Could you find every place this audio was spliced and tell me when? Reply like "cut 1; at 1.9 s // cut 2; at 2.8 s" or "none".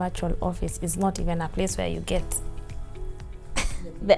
none